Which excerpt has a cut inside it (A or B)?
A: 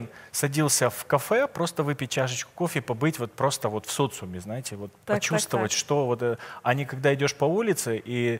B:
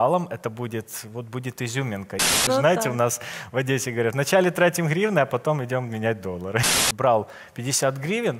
B